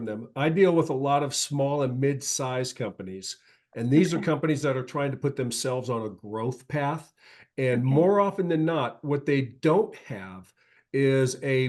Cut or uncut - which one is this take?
uncut